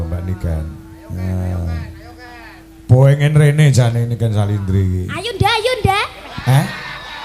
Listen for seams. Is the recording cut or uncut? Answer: uncut